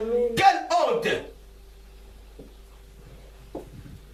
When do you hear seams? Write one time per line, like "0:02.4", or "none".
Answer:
none